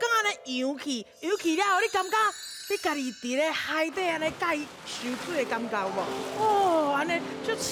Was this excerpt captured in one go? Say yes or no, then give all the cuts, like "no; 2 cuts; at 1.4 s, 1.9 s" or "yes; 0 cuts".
yes; 0 cuts